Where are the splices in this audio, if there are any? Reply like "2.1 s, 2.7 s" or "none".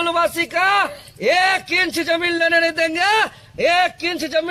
none

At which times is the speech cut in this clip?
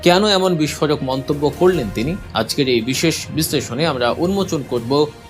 2.2 s

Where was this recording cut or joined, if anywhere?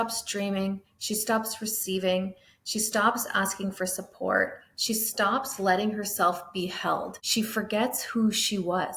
7.2 s

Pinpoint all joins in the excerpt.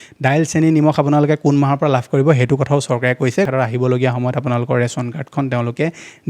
3.5 s

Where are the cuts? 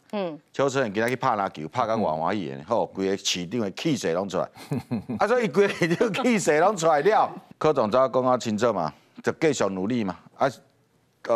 7.4 s

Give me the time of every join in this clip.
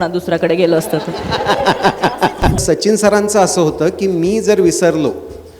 2.6 s

